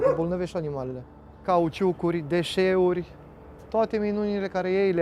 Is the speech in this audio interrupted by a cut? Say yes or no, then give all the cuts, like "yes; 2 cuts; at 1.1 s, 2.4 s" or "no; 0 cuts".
yes; 1 cut; at 1.3 s